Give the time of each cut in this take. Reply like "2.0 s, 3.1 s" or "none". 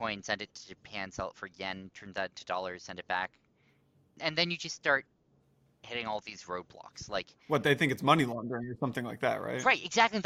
4.1 s, 7.3 s